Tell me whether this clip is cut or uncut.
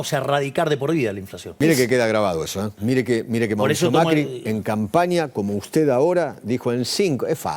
cut